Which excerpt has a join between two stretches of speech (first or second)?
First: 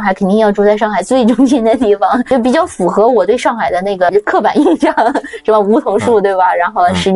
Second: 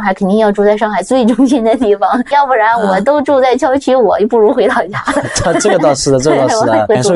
first